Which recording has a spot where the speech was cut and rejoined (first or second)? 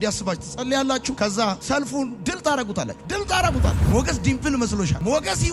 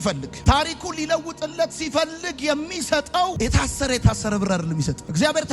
second